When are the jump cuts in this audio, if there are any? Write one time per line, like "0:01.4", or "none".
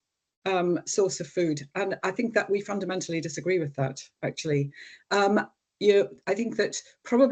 none